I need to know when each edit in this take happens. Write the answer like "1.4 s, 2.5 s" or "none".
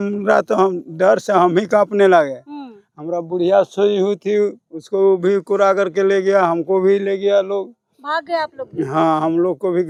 none